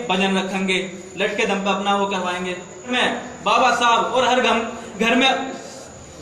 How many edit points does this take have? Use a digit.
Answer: 1